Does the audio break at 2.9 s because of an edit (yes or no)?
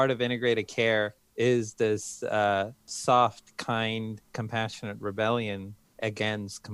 yes